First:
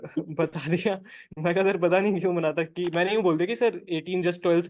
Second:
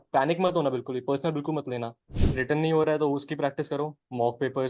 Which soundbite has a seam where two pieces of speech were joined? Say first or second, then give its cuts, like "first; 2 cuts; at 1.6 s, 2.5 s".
second; 1 cut; at 2.0 s